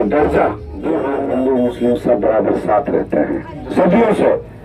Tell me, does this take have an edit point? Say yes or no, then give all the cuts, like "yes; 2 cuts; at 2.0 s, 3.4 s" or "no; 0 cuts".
yes; 1 cut; at 1.1 s